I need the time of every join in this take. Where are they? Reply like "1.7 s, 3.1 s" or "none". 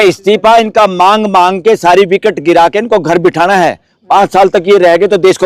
none